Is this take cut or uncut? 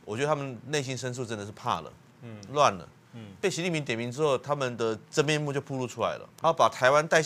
cut